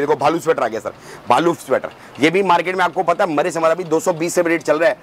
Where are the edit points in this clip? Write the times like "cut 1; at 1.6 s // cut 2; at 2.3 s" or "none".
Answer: none